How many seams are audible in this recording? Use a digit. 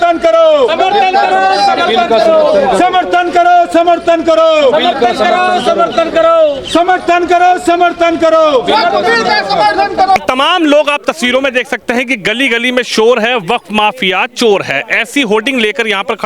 0